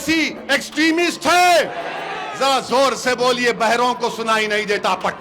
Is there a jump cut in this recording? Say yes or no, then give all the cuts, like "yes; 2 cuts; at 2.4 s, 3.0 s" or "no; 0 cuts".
no; 0 cuts